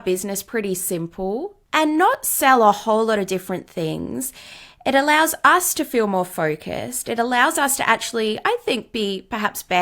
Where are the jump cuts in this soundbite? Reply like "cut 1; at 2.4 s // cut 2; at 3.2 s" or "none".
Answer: cut 1; at 1.6 s